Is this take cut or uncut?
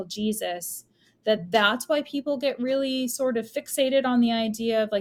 uncut